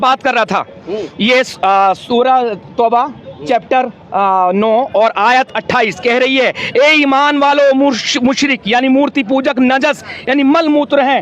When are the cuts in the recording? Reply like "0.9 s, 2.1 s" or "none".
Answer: none